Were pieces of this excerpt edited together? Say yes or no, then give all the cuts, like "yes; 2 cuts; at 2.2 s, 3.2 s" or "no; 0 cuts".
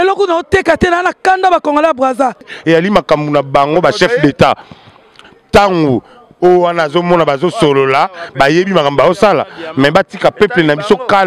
yes; 1 cut; at 2.5 s